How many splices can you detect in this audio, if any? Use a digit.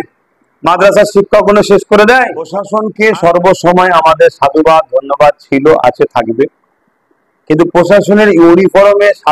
1